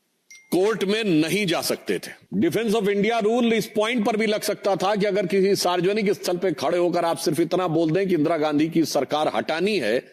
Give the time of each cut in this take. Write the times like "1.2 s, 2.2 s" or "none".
2.2 s